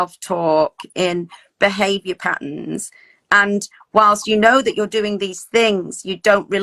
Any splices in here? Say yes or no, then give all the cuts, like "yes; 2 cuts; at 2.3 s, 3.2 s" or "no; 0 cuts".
no; 0 cuts